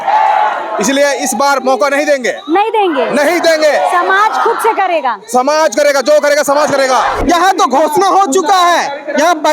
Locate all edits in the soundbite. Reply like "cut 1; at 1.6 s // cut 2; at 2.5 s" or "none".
cut 1; at 7.2 s